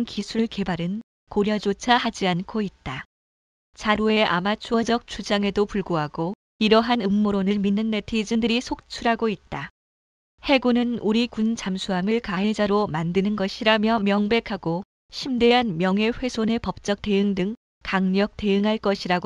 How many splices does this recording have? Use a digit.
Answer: 0